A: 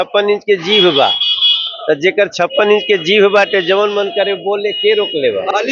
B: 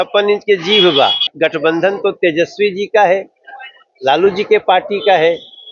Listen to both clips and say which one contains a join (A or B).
B